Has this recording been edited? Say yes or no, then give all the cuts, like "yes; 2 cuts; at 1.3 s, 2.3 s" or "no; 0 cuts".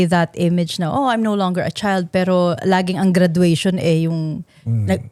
no; 0 cuts